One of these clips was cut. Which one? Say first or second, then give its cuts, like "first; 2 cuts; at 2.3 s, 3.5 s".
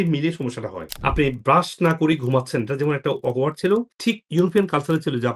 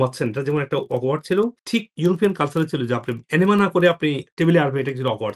first; 1 cut; at 0.9 s